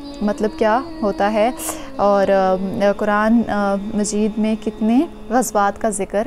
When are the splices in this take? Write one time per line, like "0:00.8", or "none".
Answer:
0:05.2